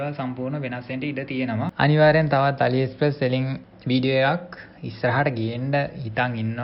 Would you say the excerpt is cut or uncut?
cut